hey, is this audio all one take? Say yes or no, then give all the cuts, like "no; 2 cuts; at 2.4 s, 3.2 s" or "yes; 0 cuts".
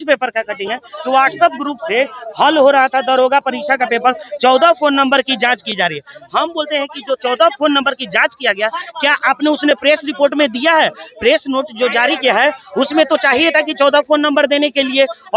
yes; 0 cuts